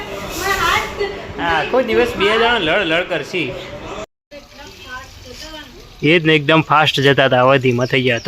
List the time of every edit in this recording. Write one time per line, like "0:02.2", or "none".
0:04.0